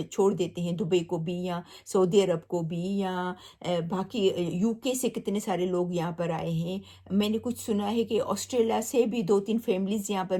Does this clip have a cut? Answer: no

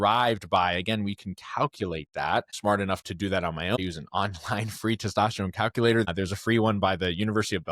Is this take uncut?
no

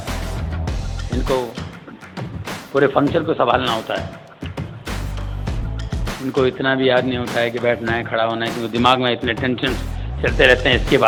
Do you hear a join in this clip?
no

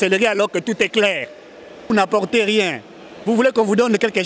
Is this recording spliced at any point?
yes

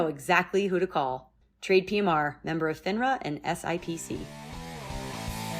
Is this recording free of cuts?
no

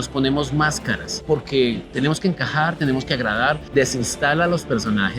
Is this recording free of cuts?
no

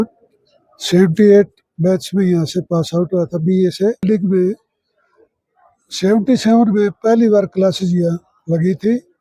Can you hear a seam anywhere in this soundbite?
yes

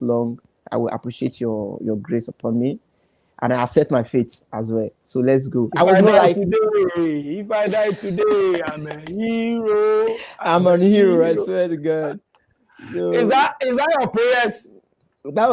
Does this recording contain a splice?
no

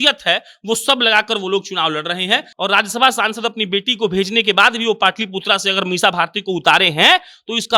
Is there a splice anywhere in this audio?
yes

